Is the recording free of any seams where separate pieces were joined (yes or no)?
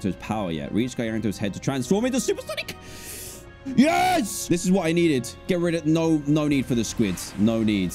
yes